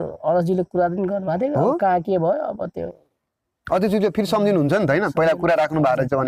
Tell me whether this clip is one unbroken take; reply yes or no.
yes